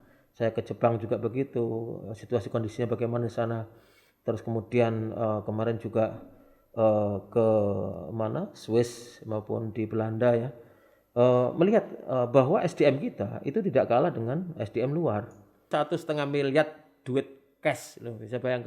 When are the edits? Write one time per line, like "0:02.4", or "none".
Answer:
0:15.7